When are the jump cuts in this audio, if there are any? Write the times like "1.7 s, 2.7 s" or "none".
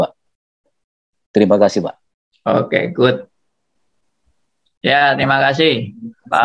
none

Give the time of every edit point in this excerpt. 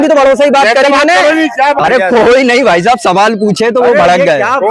1.8 s

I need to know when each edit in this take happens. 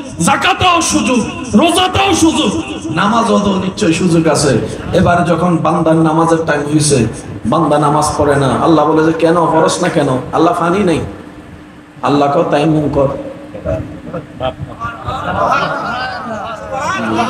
none

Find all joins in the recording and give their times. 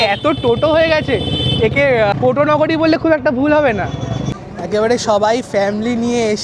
none

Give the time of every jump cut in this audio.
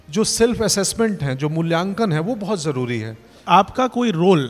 3.3 s

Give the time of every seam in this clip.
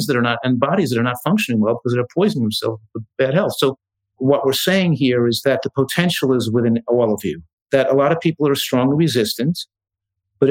3.1 s, 4.1 s, 5.4 s, 7.5 s

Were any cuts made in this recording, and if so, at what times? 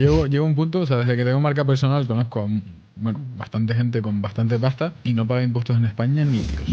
5.0 s

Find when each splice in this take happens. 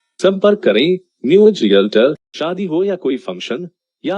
2.3 s

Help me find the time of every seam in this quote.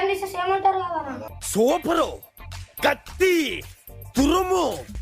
1.2 s

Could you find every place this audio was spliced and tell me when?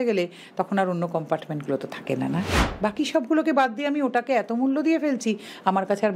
2.6 s

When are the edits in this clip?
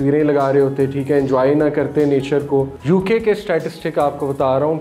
2.8 s

